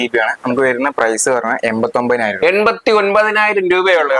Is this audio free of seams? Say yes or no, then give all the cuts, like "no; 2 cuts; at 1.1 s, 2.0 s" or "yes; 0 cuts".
yes; 0 cuts